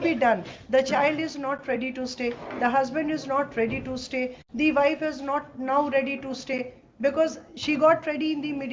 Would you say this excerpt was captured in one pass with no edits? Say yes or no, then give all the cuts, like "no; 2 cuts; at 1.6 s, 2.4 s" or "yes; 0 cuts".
yes; 0 cuts